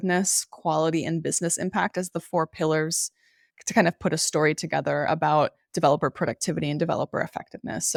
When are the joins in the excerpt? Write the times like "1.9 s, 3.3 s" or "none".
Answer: none